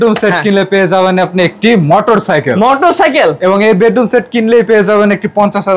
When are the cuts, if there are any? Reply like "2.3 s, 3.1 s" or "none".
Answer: none